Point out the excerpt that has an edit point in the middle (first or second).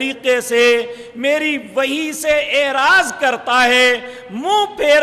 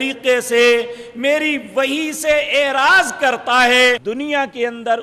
second